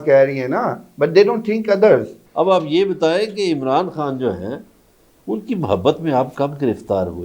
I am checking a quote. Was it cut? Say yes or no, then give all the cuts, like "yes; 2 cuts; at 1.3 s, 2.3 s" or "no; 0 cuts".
yes; 1 cut; at 2.2 s